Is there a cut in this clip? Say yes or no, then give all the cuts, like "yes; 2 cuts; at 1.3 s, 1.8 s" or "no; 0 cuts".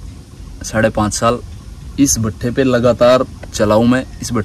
no; 0 cuts